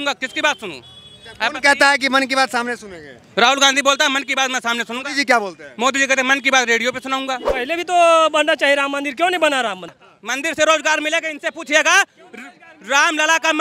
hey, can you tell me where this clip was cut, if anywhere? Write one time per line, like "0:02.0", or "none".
0:07.5
0:10.0